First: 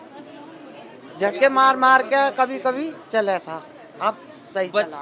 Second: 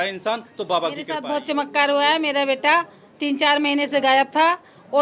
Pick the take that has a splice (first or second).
second